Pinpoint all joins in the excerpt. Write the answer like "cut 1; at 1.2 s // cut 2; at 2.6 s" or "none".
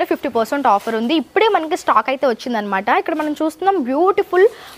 none